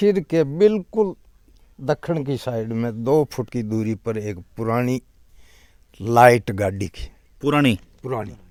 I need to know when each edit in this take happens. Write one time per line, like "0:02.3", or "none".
none